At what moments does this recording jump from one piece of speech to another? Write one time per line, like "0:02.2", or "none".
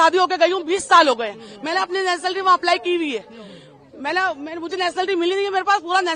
none